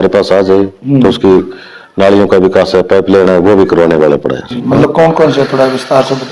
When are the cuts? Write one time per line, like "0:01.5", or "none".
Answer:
0:04.6